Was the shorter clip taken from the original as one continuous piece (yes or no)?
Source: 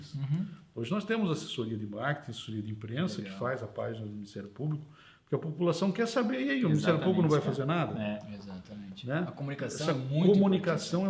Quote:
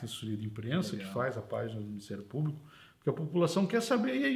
yes